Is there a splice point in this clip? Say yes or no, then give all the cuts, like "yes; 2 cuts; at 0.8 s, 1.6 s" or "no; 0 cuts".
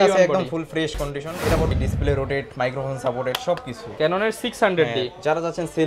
yes; 1 cut; at 1.7 s